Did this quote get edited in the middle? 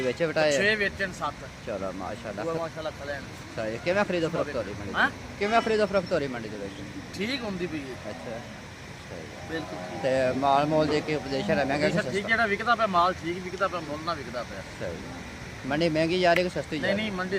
no; 0 cuts

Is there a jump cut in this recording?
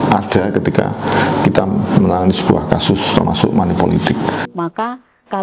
yes; 1 cut; at 4.4 s

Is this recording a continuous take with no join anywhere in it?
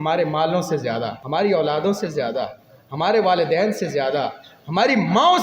no; 1 cut; at 1.2 s

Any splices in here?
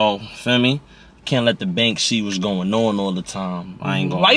no; 0 cuts

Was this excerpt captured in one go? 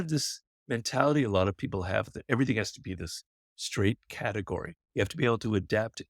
no; 1 cut; at 4.8 s

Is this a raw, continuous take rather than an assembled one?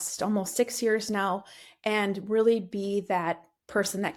yes; 0 cuts

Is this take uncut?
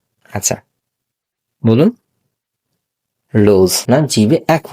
no; 1 cut; at 3.8 s

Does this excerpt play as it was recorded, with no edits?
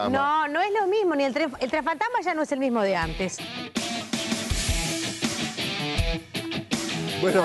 no; 1 cut; at 1.6 s

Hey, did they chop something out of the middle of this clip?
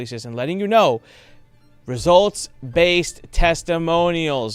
no; 0 cuts

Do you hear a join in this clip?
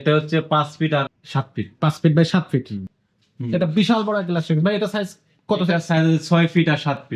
yes; 2 cuts; at 1.2 s, 2.8 s

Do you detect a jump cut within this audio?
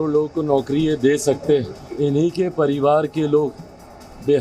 yes; 1 cut; at 1.9 s

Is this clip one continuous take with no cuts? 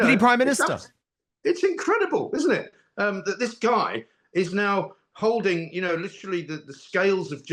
yes; 0 cuts

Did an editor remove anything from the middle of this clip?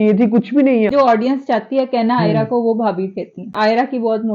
yes; 2 cuts; at 0.9 s, 3.5 s

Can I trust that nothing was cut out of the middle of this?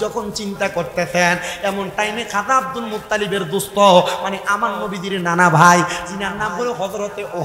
yes; 0 cuts

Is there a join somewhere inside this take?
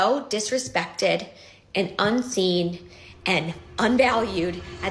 no; 0 cuts

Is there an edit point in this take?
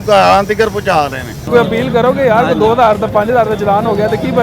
yes; 1 cut; at 1.4 s

